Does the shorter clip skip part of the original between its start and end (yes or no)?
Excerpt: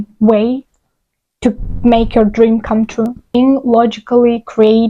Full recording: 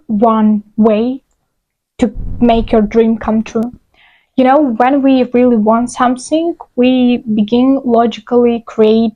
yes